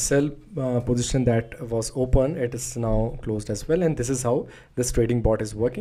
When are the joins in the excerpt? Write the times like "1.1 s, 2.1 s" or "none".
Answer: none